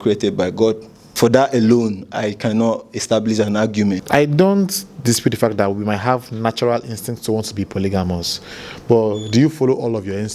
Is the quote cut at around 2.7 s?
no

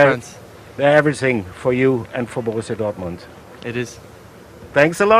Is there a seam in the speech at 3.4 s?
no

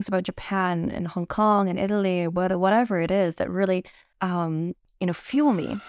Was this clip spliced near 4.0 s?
yes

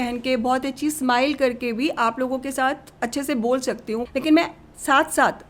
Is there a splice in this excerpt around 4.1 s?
yes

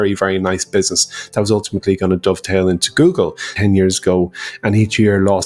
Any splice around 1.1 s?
no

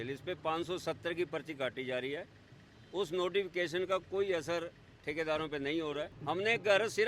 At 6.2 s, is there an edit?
yes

